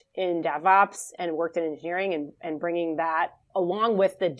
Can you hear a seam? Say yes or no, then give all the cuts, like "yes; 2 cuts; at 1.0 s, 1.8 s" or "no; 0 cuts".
yes; 1 cut; at 3.4 s